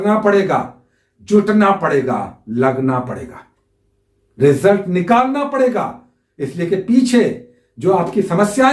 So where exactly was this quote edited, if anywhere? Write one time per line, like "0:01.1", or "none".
none

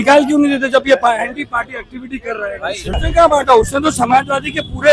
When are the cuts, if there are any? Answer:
0:03.0

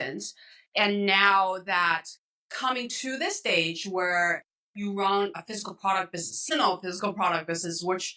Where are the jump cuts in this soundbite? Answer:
0:05.4

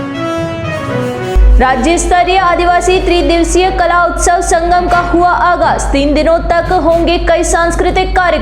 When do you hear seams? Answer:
0:01.2

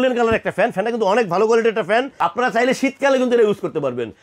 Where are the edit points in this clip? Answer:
0:02.2

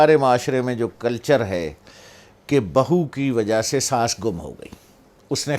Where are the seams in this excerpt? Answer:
none

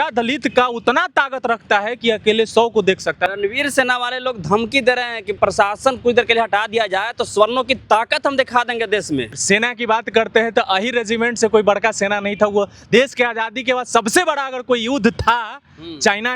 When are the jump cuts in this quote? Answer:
0:03.3
0:05.4
0:09.4

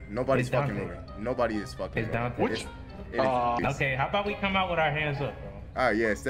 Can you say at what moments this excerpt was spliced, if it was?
0:03.6

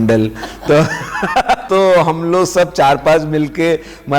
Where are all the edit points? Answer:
0:01.6

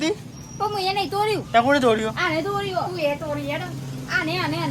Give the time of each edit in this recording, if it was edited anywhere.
none

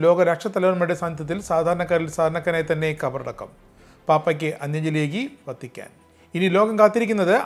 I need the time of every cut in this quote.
none

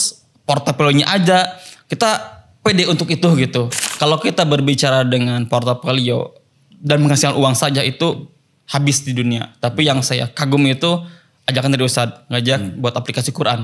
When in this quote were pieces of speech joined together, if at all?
0:03.8

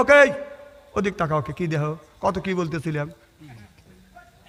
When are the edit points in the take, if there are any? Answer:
none

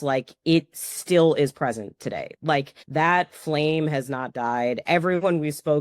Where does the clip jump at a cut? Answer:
0:02.8

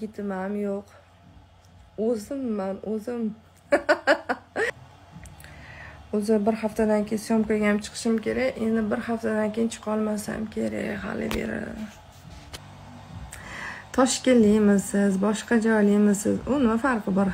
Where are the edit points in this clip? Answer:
0:04.7
0:12.6

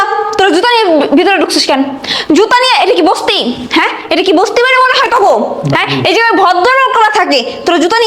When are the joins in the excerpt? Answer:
none

